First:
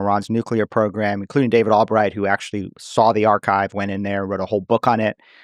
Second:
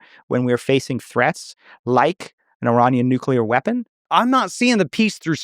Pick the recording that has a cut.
second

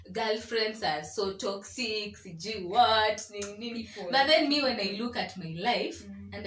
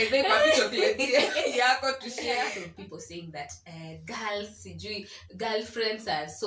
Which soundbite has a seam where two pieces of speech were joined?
second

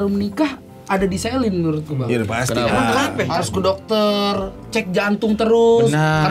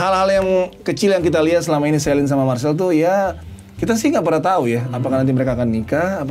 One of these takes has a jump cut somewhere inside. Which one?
first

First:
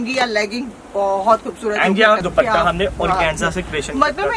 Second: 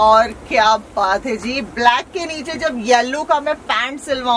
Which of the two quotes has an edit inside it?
first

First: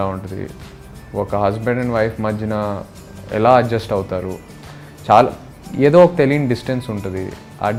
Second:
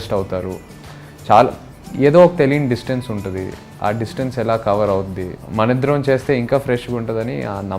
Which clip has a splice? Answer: second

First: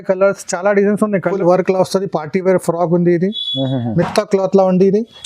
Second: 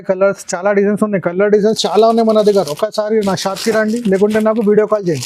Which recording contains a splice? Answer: first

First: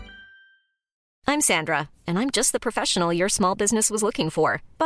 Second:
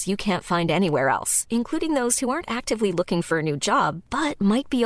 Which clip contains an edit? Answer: first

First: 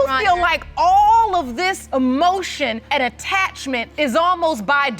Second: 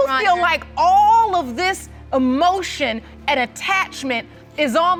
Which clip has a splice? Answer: first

